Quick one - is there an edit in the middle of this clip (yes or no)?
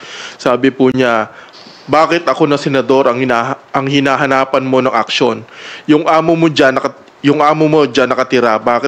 no